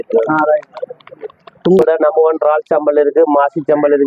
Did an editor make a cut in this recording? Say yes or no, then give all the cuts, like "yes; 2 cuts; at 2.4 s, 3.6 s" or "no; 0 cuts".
yes; 1 cut; at 1.8 s